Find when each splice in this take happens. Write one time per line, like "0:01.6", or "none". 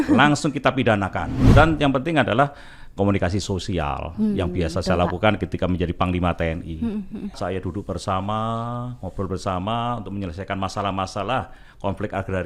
0:01.3
0:07.4